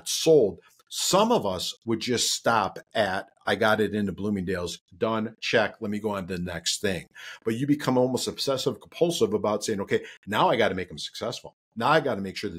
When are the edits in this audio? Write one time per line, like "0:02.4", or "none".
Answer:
none